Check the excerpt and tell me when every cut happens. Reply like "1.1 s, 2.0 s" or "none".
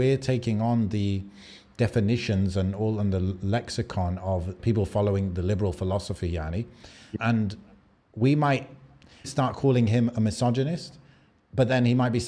4.6 s, 7.1 s, 9.3 s

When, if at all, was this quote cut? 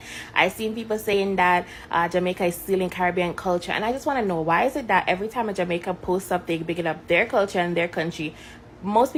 none

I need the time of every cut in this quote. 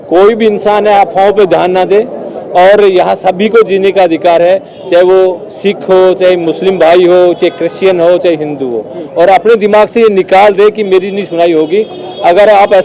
none

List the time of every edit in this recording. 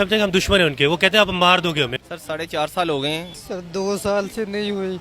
1.9 s, 3.3 s

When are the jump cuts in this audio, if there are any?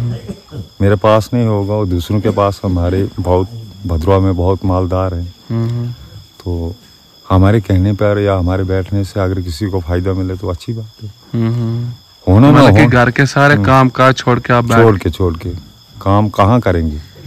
none

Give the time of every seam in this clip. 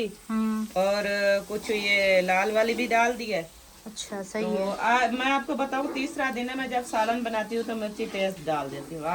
none

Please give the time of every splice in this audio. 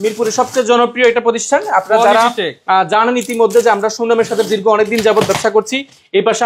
none

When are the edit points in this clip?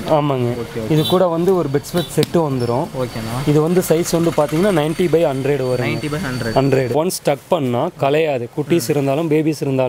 6.9 s

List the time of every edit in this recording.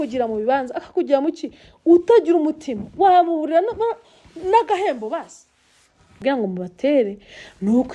6.2 s

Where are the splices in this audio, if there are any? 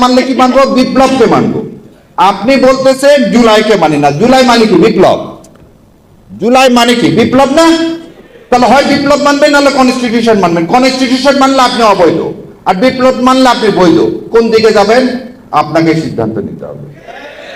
none

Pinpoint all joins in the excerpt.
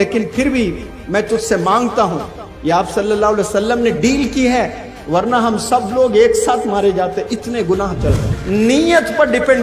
8.3 s

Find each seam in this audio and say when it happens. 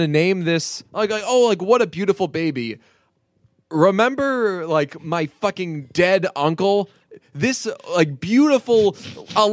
5.8 s

